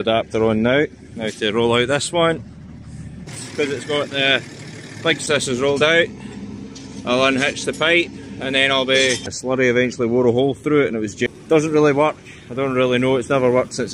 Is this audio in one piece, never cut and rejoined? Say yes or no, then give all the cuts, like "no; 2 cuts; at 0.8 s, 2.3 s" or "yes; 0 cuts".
no; 4 cuts; at 3.4 s, 5.2 s, 9.4 s, 11.2 s